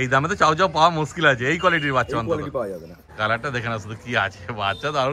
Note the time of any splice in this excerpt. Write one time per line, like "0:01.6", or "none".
0:03.0